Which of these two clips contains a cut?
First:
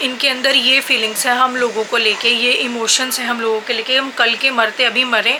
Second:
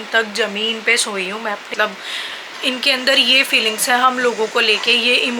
second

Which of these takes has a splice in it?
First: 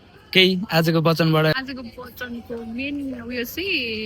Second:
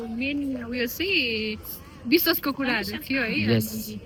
first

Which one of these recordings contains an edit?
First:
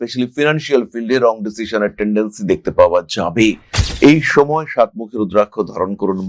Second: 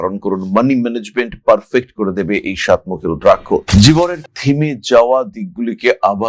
second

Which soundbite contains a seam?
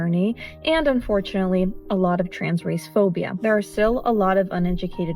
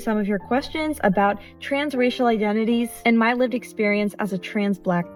first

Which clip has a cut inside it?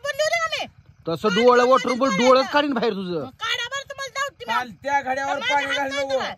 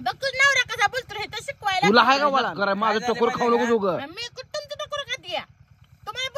second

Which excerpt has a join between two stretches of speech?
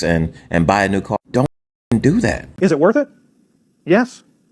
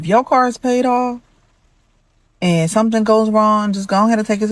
first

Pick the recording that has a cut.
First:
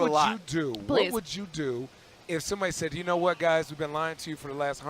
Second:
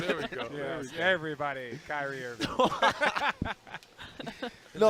first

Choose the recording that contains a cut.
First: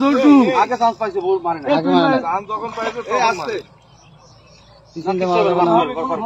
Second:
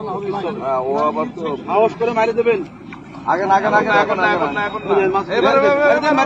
first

